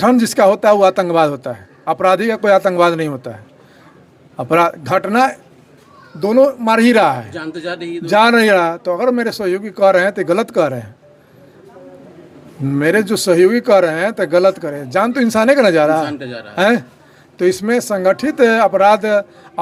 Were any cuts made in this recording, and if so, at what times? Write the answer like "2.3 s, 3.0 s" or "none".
none